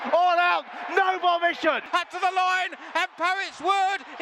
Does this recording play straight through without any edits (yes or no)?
no